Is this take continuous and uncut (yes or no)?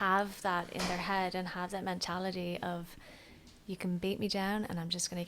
yes